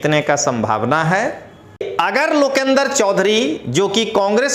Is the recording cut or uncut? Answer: cut